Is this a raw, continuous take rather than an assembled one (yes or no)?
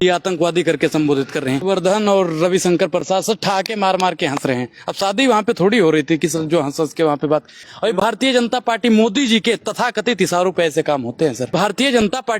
no